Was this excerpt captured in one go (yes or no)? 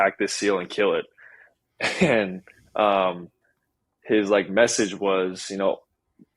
yes